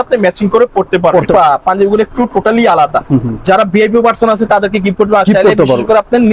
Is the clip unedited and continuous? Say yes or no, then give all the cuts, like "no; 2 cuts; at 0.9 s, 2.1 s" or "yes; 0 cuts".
no; 1 cut; at 1.3 s